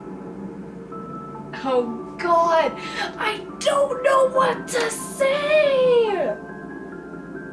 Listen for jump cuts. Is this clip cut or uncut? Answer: uncut